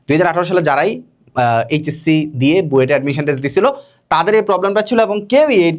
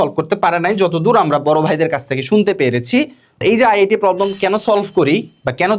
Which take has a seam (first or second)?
second